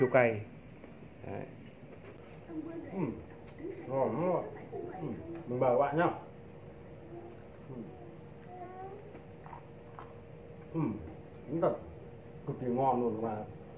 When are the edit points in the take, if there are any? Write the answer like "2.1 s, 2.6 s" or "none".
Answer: 2.2 s